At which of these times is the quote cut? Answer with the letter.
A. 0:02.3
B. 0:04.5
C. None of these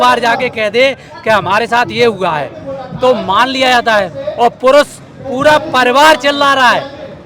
C